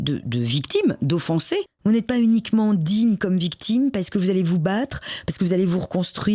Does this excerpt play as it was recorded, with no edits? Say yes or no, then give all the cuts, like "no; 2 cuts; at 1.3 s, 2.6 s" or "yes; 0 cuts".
no; 1 cut; at 1.7 s